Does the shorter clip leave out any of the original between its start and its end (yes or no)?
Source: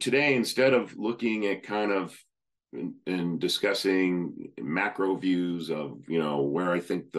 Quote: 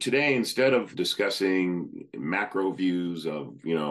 yes